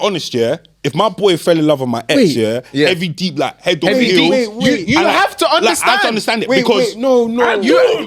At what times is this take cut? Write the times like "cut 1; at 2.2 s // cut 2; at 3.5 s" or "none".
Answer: none